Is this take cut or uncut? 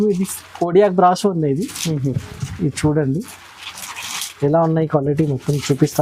uncut